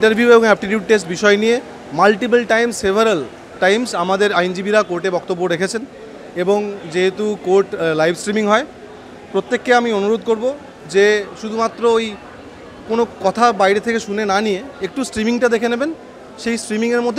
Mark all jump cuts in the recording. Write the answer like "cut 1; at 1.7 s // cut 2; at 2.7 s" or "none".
none